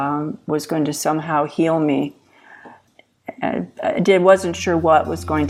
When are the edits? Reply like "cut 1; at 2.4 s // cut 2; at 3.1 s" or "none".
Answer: cut 1; at 2.8 s